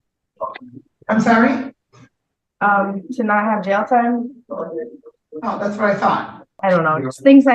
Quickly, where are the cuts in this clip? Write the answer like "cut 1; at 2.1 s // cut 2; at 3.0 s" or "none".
cut 1; at 6.5 s